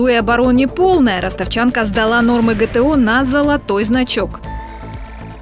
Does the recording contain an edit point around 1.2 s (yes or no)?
no